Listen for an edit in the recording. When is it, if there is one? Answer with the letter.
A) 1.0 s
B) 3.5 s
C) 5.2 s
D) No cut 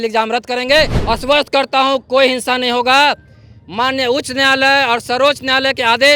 A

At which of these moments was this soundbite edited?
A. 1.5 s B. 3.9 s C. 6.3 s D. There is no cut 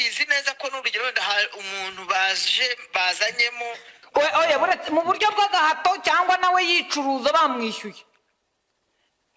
B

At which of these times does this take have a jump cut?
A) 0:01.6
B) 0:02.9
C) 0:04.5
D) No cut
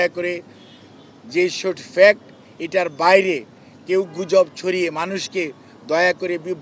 D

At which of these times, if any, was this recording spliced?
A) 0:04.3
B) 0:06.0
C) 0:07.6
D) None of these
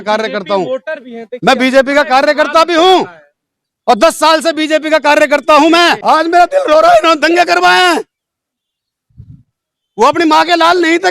B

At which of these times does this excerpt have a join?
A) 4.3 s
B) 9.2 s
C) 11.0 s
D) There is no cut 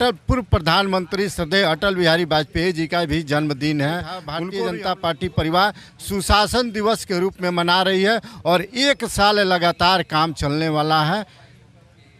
A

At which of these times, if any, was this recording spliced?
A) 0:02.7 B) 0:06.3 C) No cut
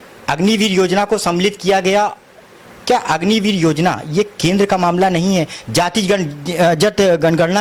C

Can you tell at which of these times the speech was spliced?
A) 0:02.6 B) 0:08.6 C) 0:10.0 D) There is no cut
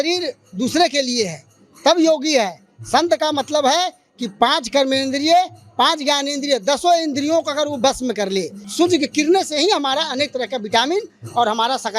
B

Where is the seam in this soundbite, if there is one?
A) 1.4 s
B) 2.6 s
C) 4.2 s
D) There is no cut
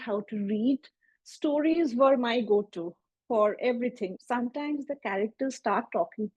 C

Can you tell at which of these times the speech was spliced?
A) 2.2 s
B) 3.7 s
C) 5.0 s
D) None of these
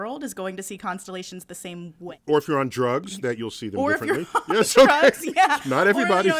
A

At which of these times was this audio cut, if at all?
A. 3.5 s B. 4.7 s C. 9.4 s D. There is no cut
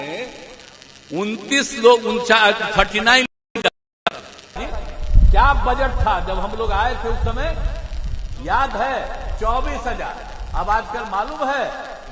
B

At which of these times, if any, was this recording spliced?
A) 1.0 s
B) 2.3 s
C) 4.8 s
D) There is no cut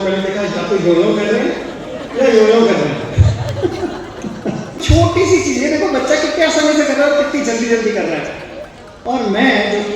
C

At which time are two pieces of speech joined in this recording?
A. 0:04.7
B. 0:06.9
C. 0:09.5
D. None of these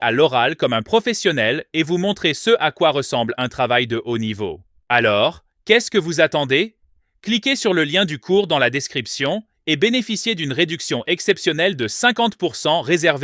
A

